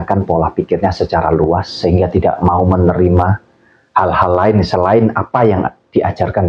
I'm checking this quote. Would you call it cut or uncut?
uncut